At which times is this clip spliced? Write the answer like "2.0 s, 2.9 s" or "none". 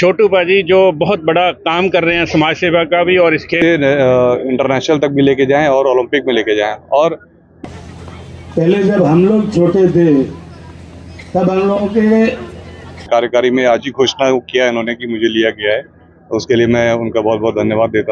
3.6 s, 7.5 s, 13.1 s

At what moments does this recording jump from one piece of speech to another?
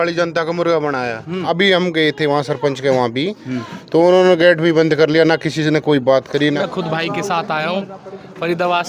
1.4 s, 6.6 s

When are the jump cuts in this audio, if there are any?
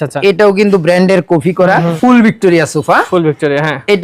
1.9 s

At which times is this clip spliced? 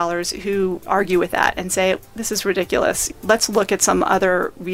2.0 s, 3.1 s

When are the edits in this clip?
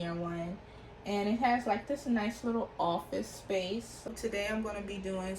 4.1 s

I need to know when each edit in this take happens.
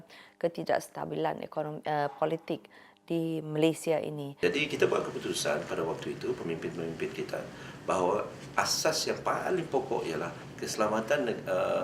4.2 s

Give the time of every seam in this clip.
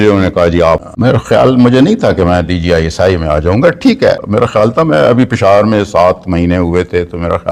none

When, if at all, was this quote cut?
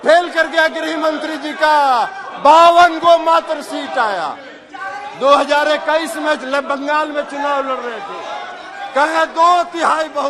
none

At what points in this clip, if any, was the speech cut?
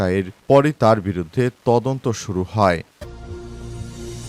3.0 s

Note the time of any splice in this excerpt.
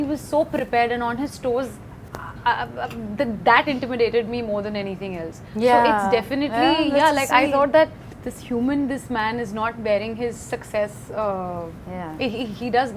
none

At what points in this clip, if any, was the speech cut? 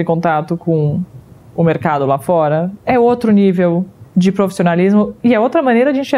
2.7 s

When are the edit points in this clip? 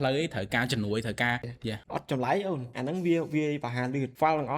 1.4 s

